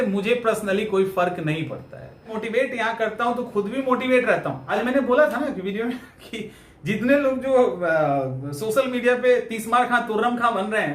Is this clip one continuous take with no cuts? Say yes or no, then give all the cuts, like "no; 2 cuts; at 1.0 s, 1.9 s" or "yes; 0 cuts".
no; 2 cuts; at 2.4 s, 4.6 s